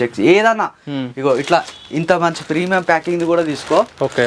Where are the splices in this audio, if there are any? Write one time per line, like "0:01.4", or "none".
none